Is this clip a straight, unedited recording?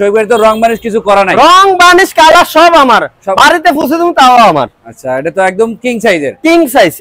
yes; 0 cuts

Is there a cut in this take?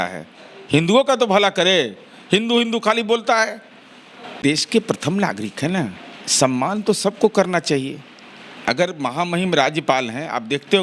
yes; 1 cut; at 4.3 s

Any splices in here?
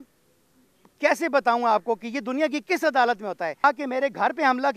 yes; 1 cut; at 3.6 s

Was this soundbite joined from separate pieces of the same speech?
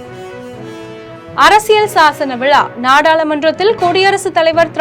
yes; 1 cut; at 1.3 s

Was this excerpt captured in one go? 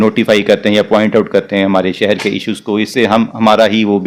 yes; 0 cuts

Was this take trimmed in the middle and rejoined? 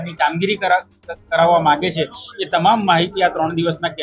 no; 0 cuts

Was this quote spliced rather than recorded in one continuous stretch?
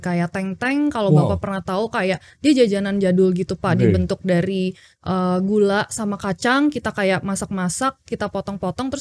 no; 0 cuts

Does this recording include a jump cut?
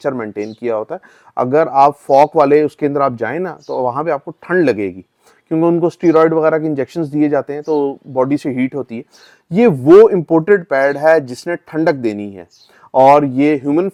no; 0 cuts

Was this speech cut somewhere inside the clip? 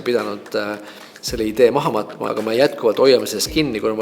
yes; 1 cut; at 2.2 s

